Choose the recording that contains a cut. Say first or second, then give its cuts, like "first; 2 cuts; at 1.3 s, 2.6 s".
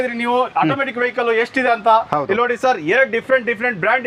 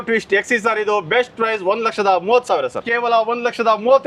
second; 1 cut; at 2.9 s